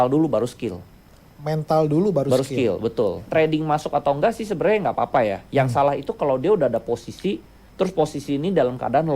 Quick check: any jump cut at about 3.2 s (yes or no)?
yes